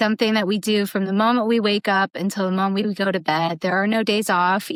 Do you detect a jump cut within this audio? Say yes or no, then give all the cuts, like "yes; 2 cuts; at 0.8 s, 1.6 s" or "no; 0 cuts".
no; 0 cuts